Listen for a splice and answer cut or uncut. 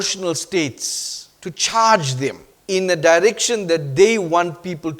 cut